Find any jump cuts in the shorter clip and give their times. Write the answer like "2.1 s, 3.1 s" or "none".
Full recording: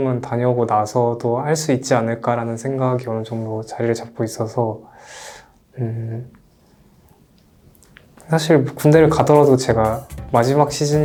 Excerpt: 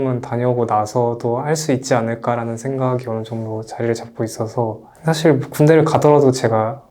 4.9 s

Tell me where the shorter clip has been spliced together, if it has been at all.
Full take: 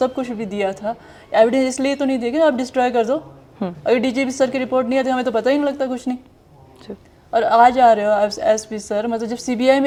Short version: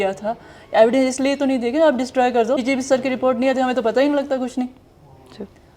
2.6 s

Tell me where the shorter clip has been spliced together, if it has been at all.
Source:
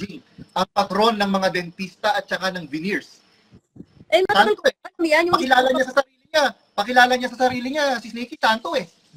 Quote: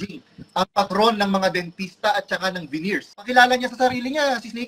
3.3 s

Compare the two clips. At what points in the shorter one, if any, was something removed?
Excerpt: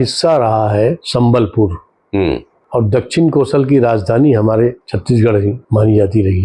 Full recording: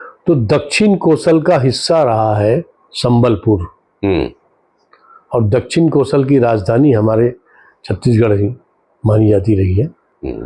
1.0 s, 2.5 s, 5.3 s

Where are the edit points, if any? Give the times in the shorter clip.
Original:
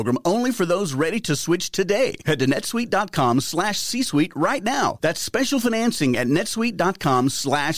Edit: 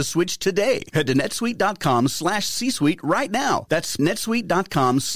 4.0 s

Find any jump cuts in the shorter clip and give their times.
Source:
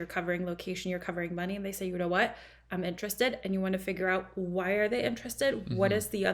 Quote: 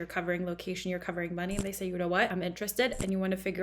2.3 s

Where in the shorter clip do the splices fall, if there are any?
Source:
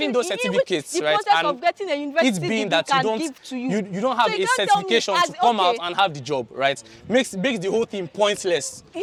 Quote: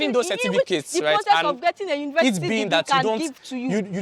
none

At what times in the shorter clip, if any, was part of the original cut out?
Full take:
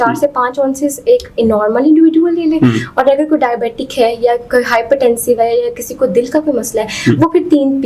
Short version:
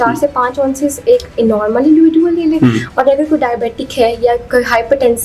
none

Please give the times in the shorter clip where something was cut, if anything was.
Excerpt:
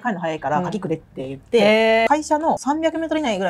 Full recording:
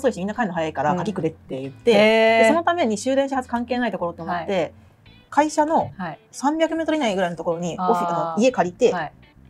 2.1 s

